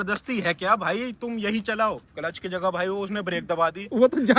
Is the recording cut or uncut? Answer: cut